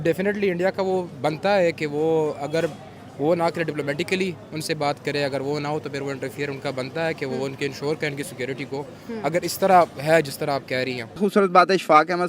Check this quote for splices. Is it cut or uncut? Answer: cut